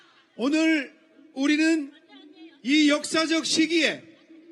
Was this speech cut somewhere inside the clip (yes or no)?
yes